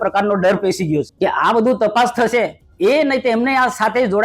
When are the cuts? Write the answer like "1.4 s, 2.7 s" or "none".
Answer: 1.1 s, 2.6 s